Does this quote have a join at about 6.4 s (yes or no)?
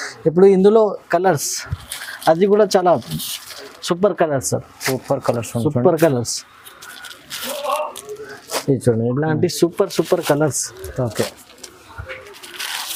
no